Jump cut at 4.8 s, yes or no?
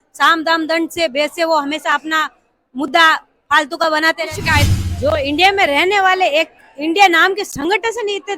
yes